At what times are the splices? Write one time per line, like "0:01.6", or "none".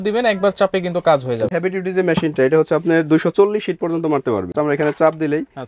0:01.5
0:04.5